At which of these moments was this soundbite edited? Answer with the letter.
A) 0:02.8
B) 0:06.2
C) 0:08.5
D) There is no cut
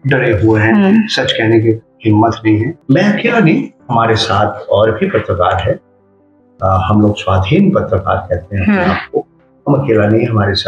A